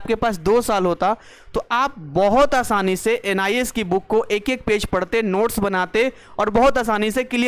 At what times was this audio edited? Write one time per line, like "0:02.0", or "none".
none